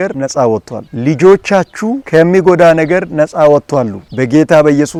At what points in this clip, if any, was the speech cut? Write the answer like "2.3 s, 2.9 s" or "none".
none